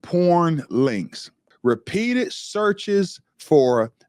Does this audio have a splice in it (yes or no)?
yes